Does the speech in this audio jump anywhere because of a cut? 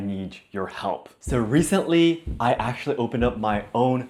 no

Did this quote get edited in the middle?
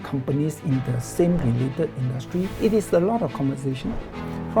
yes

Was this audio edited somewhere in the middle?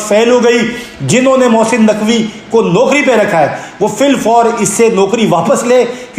no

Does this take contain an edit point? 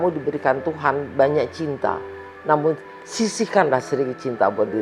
no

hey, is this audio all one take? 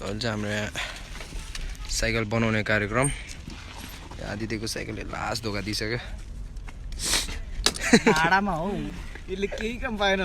yes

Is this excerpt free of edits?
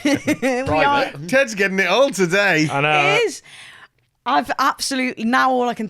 yes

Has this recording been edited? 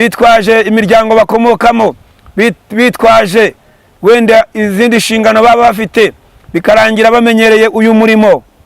no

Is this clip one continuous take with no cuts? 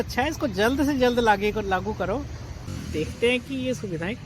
no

